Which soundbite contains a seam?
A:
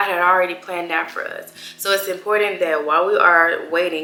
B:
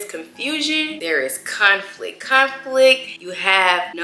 B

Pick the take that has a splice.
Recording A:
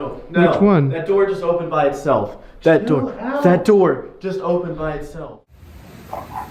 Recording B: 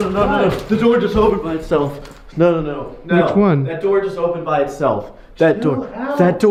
A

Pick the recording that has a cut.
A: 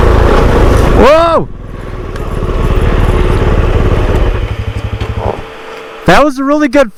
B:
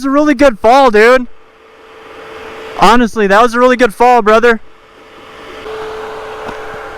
B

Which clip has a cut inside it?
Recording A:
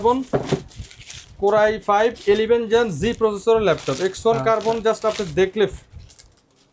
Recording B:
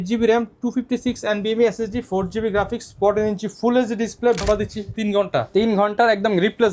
B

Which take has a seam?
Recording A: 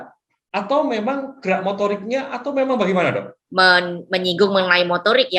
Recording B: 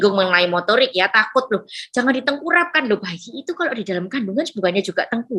A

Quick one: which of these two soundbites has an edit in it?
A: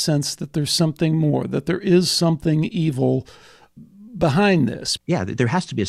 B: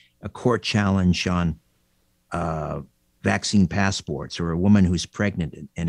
A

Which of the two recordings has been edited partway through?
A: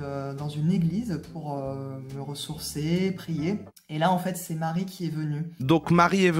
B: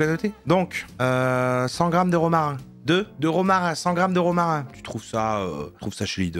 A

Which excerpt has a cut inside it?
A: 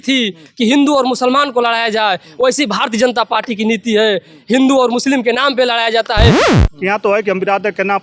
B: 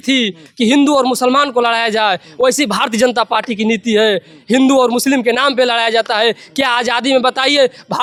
A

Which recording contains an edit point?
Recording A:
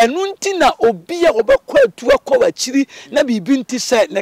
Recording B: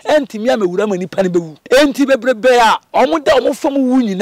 B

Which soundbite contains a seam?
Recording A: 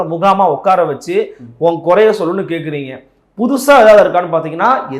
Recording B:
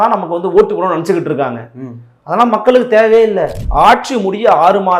B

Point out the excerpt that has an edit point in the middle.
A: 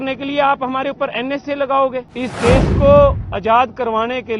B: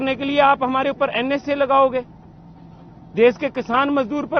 A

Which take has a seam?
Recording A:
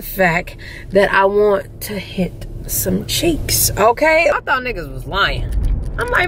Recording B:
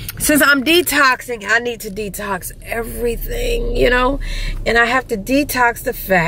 A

